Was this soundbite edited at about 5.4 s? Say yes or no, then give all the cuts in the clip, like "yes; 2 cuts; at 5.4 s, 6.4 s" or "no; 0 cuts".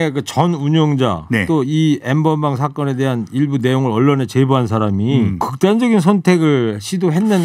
yes; 1 cut; at 5.4 s